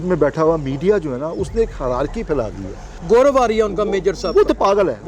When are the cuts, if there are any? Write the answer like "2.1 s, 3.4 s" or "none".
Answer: 3.0 s